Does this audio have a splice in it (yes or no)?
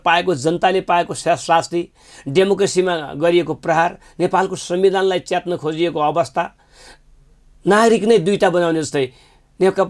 no